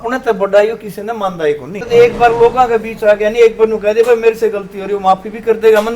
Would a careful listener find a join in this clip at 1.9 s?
yes; 1 cut; at 1.9 s

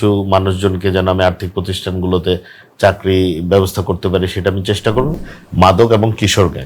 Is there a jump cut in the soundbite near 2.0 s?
no; 1 cut; at 5.1 s

